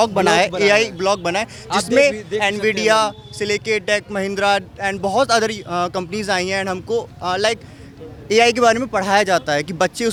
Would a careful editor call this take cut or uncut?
uncut